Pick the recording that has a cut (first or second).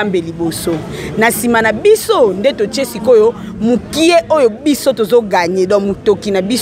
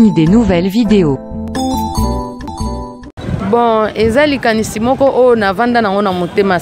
second